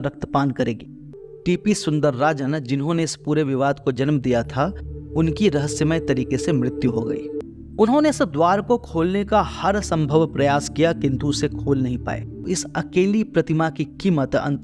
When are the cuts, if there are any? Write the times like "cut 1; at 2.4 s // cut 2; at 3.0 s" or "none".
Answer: cut 1; at 1.2 s // cut 2; at 7.3 s // cut 3; at 12.4 s